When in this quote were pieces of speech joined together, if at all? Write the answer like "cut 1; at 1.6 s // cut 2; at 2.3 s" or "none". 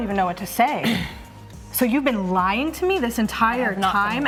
none